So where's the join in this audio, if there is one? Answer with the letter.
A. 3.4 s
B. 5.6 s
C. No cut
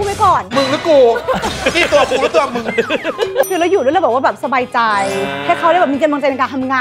A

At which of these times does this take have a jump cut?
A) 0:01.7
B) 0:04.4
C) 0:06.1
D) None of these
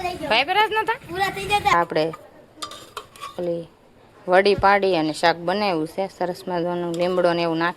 A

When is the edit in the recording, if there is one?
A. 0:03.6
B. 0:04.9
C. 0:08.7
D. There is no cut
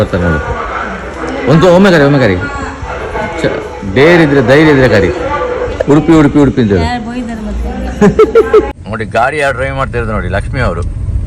C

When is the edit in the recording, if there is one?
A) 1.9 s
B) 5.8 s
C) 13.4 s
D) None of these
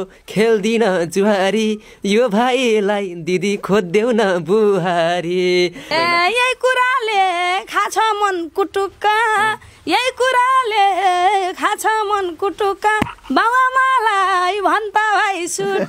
B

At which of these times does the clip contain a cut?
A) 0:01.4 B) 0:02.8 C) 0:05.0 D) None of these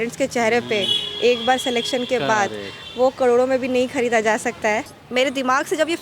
C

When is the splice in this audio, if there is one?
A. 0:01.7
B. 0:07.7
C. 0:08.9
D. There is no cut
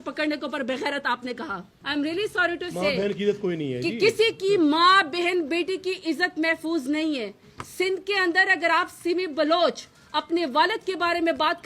A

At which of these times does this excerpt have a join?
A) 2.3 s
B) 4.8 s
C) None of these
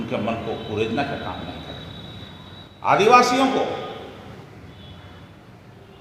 C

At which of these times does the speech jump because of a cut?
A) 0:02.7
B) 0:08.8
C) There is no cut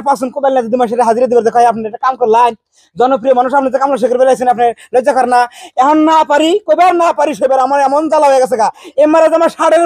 B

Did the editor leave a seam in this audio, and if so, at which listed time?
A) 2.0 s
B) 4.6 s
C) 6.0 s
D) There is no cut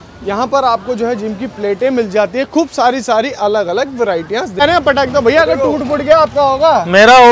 B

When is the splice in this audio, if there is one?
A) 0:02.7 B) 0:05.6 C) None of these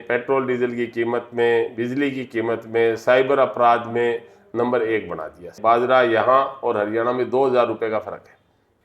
B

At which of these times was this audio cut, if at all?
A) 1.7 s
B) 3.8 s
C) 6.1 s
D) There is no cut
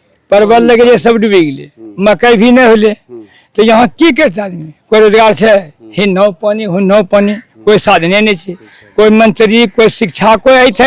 D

